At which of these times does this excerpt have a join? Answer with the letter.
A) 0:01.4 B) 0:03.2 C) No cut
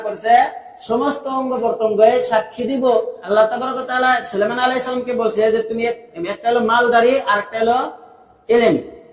B